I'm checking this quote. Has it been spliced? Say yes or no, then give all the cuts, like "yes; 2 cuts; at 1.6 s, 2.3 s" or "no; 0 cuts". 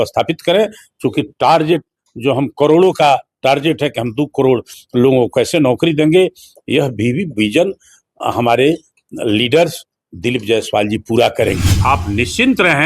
yes; 1 cut; at 11.7 s